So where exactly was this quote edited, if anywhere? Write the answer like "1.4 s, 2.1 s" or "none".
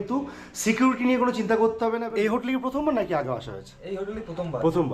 2.1 s